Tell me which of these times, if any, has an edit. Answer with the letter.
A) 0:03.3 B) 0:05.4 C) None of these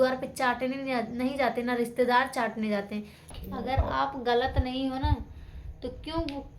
A